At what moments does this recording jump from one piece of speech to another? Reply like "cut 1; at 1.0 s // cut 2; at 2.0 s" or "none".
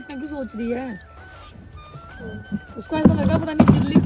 none